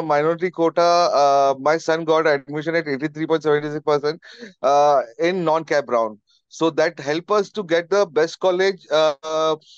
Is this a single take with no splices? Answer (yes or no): yes